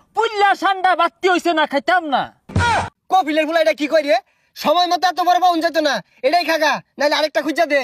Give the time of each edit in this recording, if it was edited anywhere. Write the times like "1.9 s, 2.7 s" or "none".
2.6 s